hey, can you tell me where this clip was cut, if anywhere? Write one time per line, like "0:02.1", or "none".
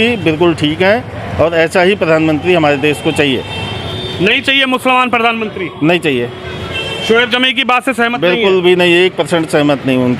none